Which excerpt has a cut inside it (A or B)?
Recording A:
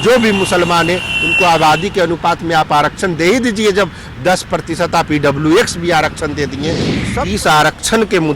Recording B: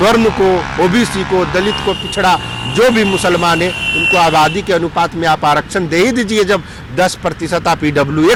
A